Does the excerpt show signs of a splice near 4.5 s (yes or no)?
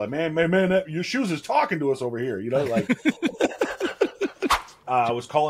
yes